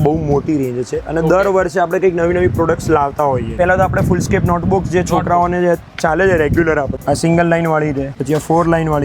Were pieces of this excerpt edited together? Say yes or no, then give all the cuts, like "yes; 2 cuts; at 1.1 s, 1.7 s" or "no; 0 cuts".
yes; 3 cuts; at 3.5 s, 6.9 s, 8.1 s